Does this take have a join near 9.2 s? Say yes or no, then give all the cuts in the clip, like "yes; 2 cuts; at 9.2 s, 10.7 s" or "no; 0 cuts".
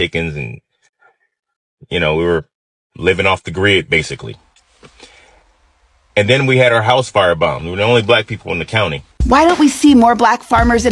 yes; 1 cut; at 9.2 s